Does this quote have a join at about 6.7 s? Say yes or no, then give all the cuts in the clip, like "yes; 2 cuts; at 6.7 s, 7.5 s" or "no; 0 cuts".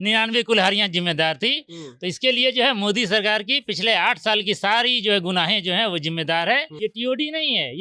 yes; 1 cut; at 6.7 s